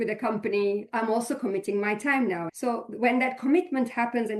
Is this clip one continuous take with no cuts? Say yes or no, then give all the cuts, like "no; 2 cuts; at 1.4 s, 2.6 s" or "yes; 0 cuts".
no; 2 cuts; at 0.9 s, 2.5 s